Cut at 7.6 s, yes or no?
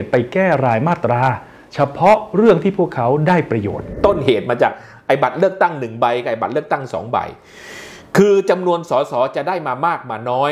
no